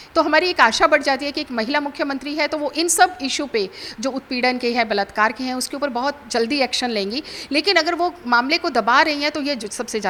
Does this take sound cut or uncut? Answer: uncut